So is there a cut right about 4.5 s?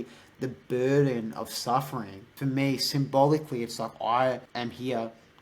yes; 2 cuts; at 2.3 s, 4.5 s

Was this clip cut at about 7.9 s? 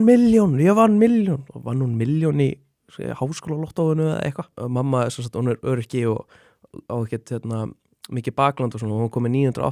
no; 1 cut; at 4.5 s

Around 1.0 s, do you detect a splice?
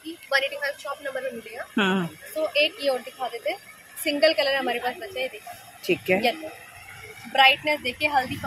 no; 0 cuts

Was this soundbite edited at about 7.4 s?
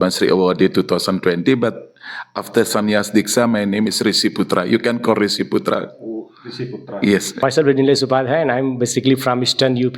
yes; 1 cut; at 7.4 s

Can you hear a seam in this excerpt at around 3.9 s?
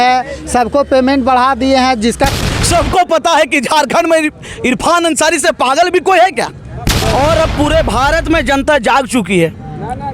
no; 2 cuts; at 2.3 s, 7.0 s

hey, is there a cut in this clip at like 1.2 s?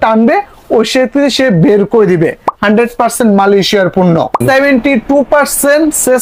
no; 2 cuts; at 2.5 s, 4.4 s

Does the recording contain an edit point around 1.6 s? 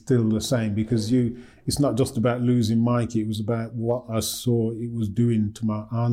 no; 0 cuts

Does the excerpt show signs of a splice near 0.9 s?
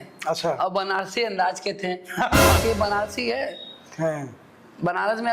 no; 1 cut; at 2.6 s

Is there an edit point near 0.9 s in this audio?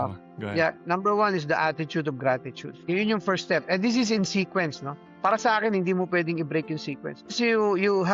no; 2 cuts; at 2.7 s, 7.3 s

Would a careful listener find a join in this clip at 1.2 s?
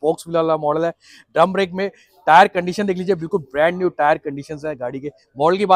no; 0 cuts

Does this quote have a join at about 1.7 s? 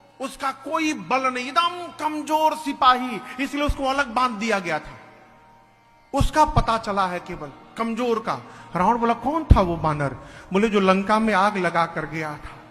no; 1 cut; at 11.6 s

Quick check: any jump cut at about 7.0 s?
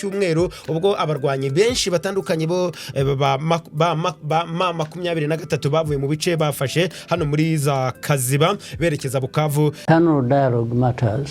no; 1 cut; at 9.8 s

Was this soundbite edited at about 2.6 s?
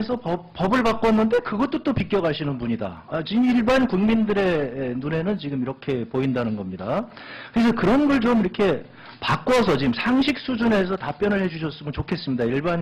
yes; 1 cut; at 2.6 s

